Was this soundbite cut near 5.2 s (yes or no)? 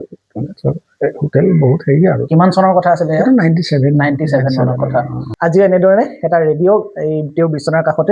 yes